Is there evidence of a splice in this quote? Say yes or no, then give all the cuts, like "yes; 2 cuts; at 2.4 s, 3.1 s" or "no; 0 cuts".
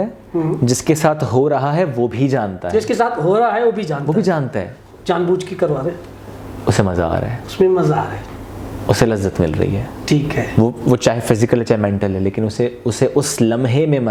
no; 0 cuts